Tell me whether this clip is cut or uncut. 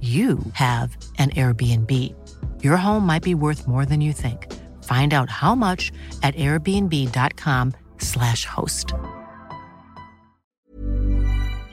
cut